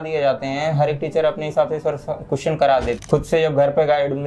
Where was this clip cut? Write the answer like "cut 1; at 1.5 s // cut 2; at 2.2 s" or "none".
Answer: cut 1; at 3.0 s